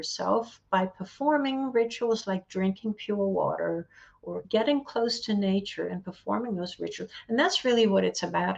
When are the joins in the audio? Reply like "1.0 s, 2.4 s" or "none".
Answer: 4.4 s

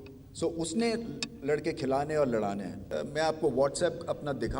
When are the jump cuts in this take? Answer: 2.8 s

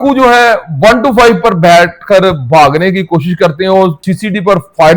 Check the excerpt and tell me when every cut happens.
4.1 s

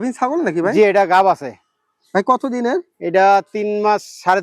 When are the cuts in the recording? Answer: none

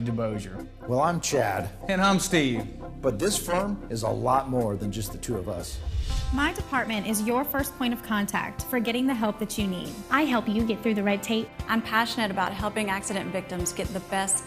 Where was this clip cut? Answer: none

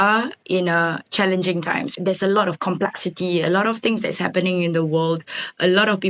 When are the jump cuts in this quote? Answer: none

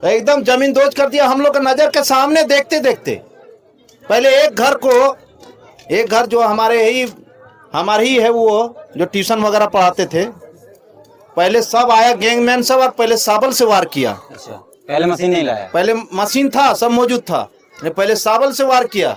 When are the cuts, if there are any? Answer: none

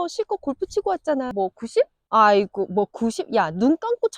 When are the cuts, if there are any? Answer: 1.3 s

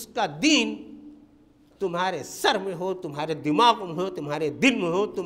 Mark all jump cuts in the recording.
none

